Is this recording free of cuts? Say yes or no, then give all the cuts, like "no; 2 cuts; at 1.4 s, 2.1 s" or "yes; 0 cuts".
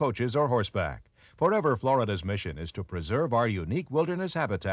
yes; 0 cuts